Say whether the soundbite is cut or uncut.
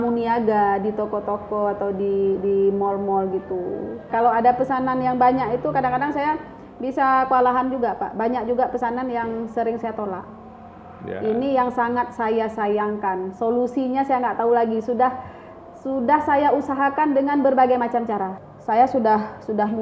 cut